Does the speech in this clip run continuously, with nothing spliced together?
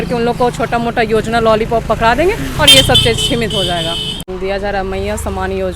no; 1 cut; at 4.2 s

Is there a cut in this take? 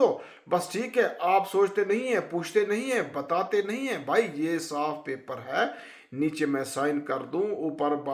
no; 0 cuts

